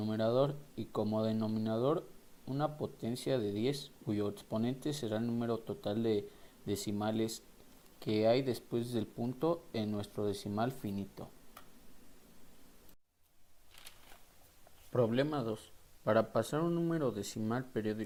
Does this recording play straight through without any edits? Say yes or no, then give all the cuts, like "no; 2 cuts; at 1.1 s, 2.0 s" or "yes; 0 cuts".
yes; 0 cuts